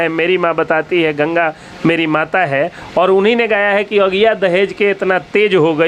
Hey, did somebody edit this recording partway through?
no; 0 cuts

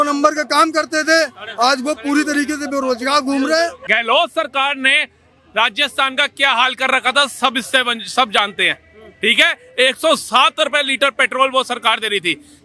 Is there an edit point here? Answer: yes; 1 cut; at 3.8 s

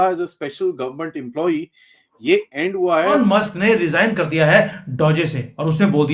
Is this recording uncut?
no; 1 cut; at 3.2 s

